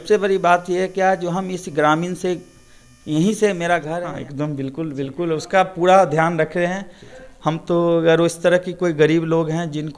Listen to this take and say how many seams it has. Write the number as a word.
one